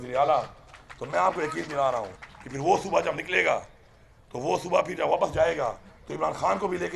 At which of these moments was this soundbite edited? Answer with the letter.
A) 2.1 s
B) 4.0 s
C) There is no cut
C